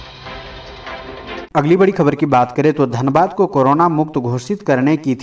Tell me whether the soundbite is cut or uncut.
cut